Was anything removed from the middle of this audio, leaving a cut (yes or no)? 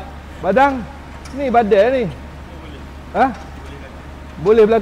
no